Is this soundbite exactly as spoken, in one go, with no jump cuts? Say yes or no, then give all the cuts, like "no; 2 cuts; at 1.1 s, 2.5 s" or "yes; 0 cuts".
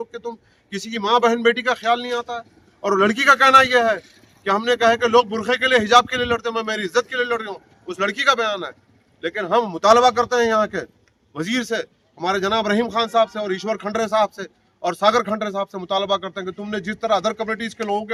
yes; 0 cuts